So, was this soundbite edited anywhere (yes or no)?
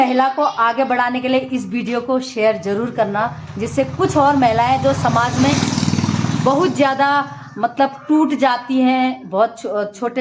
no